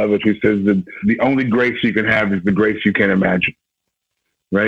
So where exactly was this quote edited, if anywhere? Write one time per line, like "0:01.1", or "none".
0:01.0